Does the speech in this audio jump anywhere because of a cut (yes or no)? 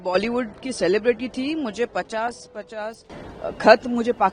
no